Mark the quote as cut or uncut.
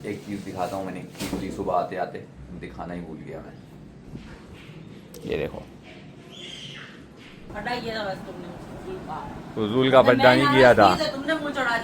cut